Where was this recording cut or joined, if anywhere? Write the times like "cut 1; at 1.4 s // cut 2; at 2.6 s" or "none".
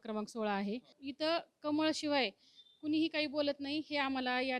cut 1; at 1.0 s